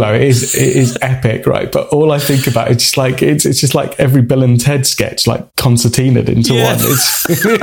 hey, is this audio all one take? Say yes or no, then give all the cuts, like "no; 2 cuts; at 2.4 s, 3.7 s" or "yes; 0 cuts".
yes; 0 cuts